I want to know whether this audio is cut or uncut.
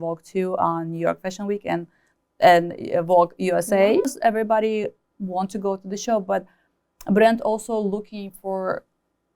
cut